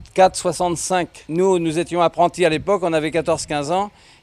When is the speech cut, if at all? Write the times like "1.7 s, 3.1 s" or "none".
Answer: 1.2 s